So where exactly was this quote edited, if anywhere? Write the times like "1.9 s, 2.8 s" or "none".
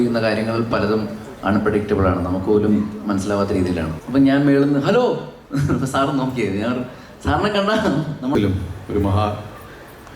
3.9 s, 8.3 s